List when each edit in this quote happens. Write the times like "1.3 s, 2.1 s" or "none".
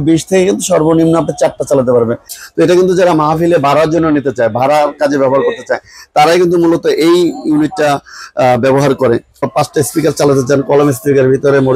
2.3 s, 9.5 s